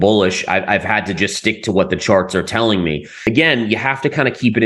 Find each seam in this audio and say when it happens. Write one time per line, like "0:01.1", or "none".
0:03.2